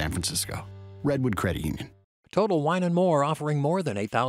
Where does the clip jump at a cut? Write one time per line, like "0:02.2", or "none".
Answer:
0:01.9